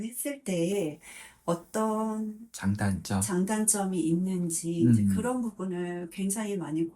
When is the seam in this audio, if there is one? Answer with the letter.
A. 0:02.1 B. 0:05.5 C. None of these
C